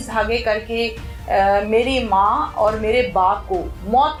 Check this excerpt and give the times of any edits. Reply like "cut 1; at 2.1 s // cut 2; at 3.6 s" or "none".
none